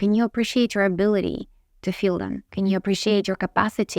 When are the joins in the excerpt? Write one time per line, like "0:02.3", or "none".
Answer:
0:02.4